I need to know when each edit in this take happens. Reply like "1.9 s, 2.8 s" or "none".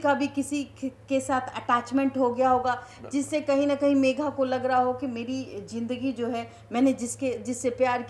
none

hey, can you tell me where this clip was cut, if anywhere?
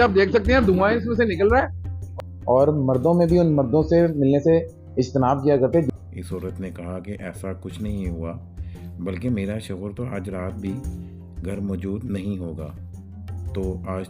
2.1 s, 5.9 s

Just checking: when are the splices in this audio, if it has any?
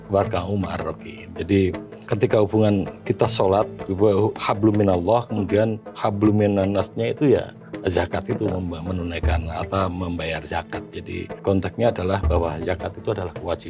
2.0 s, 3.8 s, 7.6 s, 11.4 s

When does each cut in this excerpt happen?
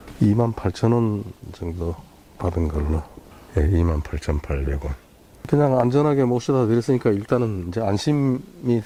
none

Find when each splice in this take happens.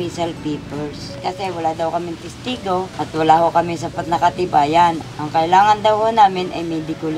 1.1 s, 2.9 s, 5.1 s

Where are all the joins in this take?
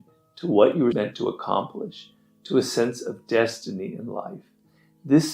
0.9 s

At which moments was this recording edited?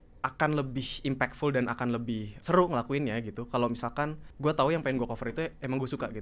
2.3 s, 4.2 s

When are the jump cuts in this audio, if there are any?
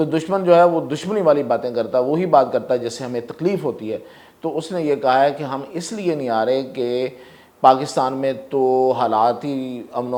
none

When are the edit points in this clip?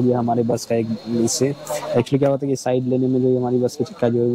none

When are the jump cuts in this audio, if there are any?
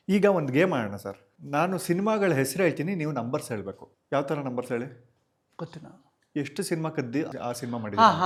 none

